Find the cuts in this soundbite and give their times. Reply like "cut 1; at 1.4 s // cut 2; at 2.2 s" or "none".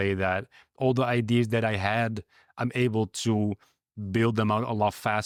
none